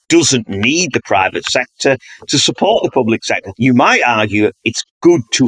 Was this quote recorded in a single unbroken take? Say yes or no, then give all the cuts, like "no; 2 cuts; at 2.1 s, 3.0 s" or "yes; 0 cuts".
no; 1 cut; at 3.5 s